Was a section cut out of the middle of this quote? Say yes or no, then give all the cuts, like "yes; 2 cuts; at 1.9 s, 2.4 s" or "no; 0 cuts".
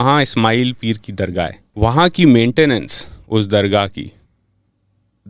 yes; 1 cut; at 1.6 s